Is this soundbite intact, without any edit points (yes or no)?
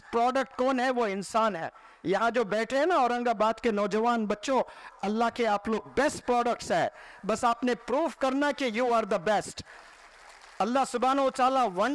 yes